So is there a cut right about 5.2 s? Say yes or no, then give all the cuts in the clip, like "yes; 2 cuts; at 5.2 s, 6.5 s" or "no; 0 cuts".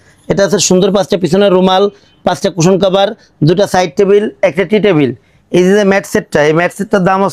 no; 0 cuts